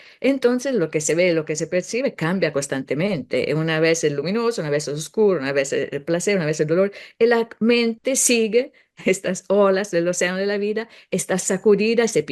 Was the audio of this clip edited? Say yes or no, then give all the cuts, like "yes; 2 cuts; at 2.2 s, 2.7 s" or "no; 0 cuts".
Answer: no; 0 cuts